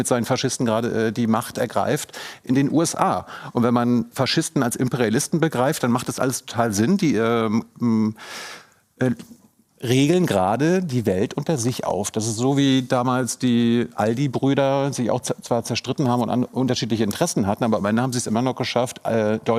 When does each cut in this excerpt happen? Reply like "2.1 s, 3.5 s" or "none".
none